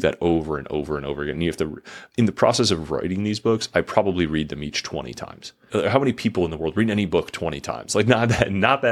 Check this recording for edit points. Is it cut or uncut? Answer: cut